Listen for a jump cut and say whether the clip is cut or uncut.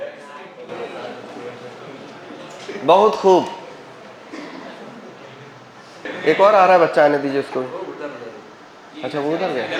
cut